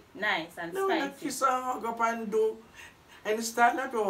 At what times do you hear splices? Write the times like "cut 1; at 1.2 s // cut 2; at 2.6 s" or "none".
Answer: none